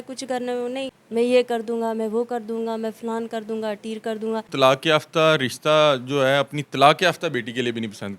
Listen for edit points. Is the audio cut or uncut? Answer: cut